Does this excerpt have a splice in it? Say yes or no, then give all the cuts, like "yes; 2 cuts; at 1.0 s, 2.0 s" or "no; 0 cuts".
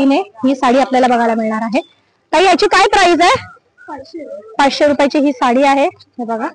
no; 0 cuts